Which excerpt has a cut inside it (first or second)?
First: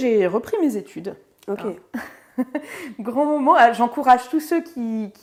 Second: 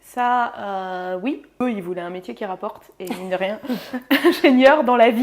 second